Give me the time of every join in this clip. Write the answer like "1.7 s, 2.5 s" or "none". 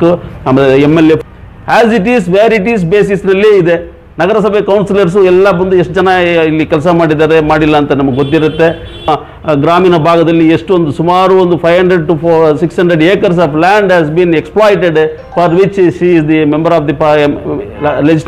1.2 s, 9.1 s